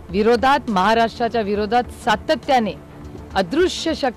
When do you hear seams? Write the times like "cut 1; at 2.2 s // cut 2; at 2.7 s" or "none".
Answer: none